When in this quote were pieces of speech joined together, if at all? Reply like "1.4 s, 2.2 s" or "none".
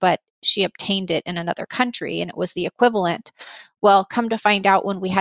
none